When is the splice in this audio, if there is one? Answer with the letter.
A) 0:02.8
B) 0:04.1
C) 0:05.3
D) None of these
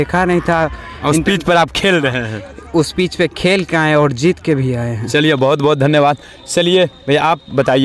D